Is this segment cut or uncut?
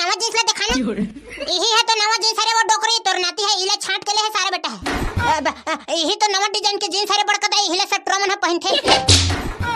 cut